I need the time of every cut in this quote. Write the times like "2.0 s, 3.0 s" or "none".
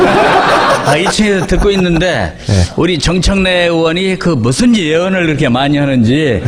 none